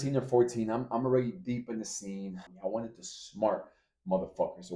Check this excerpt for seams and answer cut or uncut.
cut